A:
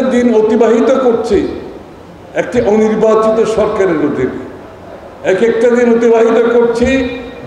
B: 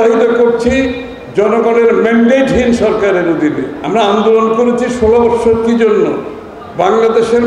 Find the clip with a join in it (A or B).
B